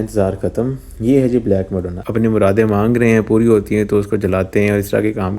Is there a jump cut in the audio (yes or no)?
yes